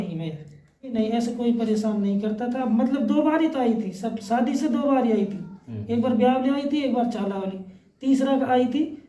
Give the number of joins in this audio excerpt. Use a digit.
1